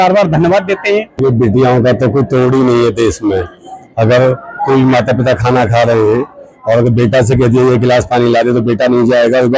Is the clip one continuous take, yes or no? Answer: no